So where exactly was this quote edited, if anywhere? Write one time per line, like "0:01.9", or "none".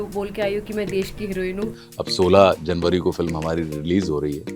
0:01.7